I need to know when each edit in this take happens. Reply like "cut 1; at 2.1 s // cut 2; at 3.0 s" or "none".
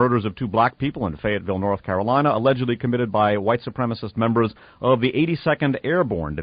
cut 1; at 4.4 s